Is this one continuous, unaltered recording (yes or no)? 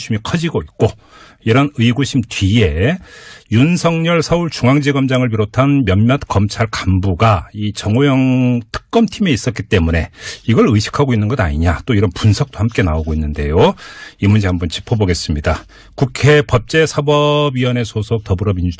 no